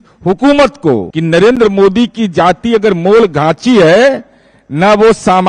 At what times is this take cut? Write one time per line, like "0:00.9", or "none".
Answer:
0:01.1